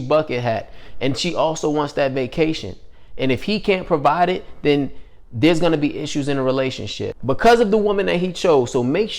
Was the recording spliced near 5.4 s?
no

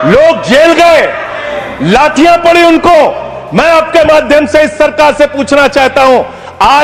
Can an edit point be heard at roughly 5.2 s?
no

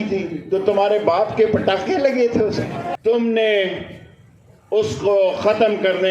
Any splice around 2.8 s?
yes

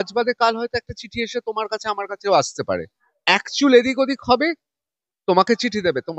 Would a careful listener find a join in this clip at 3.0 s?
yes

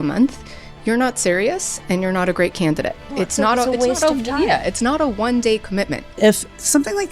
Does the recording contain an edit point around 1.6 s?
no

